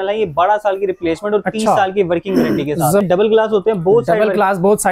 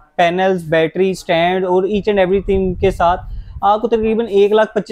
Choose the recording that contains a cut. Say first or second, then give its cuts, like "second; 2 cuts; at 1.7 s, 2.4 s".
first; 1 cut; at 3.0 s